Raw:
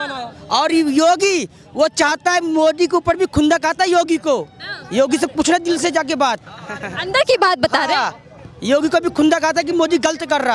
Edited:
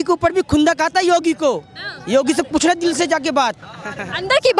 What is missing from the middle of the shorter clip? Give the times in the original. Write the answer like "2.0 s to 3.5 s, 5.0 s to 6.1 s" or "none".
none